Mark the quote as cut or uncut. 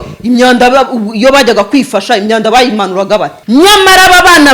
cut